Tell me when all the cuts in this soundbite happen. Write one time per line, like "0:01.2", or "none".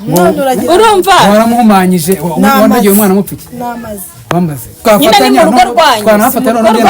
0:04.8